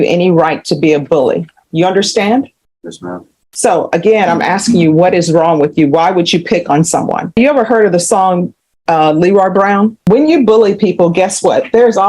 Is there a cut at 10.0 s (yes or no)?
yes